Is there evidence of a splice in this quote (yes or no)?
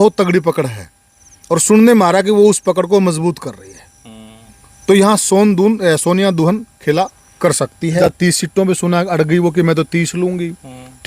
yes